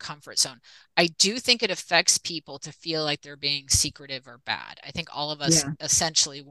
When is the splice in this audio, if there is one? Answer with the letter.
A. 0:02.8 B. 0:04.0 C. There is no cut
C